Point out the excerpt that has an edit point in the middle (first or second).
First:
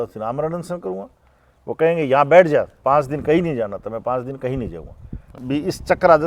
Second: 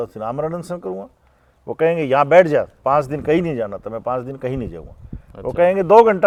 first